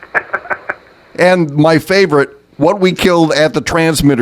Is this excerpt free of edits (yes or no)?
no